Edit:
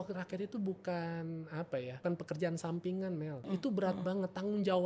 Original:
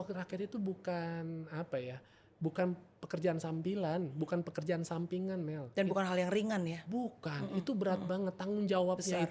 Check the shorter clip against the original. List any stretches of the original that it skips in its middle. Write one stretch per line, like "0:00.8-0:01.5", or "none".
0:02.0-0:04.3
0:05.7-0:07.4